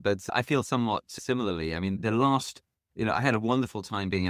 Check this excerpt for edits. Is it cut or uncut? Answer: uncut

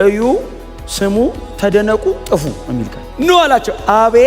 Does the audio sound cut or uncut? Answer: uncut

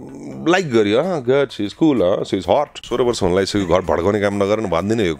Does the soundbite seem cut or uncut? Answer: cut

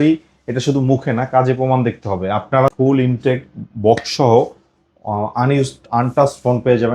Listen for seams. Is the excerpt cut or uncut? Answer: cut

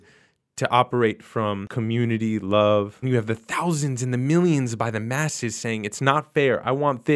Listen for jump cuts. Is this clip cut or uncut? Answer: cut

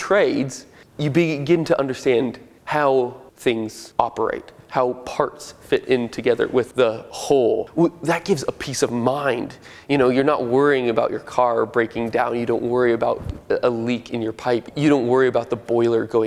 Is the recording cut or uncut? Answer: uncut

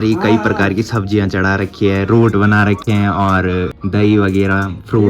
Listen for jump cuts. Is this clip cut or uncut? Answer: uncut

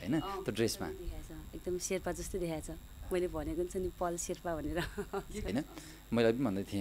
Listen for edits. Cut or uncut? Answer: cut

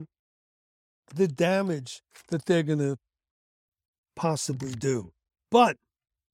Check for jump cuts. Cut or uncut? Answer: uncut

